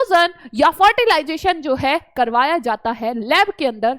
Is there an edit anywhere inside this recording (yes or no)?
no